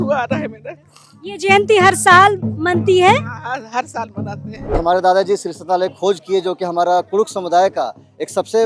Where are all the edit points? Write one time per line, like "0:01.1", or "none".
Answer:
0:04.8